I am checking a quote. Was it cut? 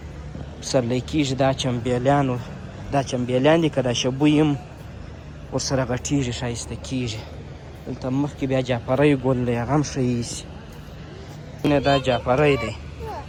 no; 0 cuts

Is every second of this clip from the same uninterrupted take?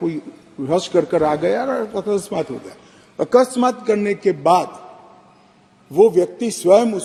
yes; 0 cuts

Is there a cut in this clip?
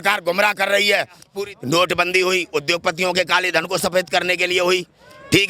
yes; 1 cut; at 1.2 s

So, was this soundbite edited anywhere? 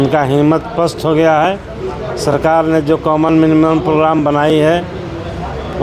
no; 0 cuts

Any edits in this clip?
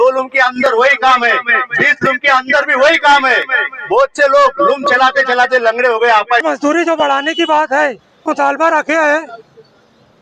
yes; 2 cuts; at 6.4 s, 8.2 s

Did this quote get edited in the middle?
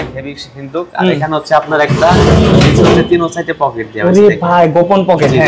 no; 0 cuts

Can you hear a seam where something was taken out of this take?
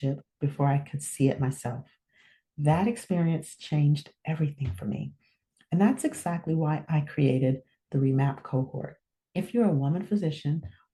no; 0 cuts

